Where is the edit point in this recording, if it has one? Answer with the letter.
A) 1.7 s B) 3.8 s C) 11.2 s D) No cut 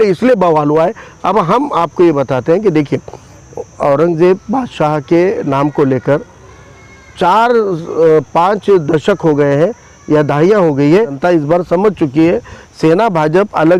C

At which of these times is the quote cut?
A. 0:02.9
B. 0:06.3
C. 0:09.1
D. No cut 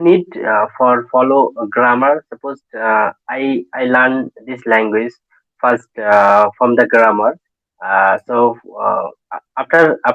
D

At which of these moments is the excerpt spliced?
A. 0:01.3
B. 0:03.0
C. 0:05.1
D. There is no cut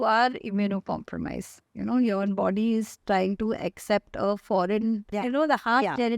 C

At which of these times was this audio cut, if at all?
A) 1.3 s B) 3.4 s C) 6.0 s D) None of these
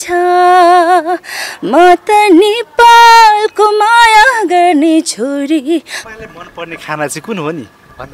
C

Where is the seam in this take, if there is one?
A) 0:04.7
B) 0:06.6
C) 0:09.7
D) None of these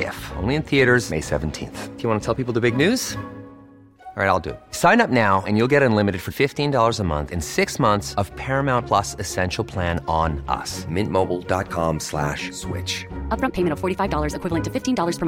D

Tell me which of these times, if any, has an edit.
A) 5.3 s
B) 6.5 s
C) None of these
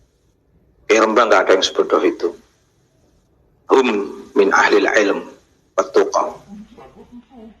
B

